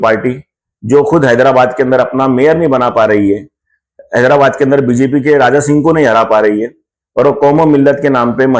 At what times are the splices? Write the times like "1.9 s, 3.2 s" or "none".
none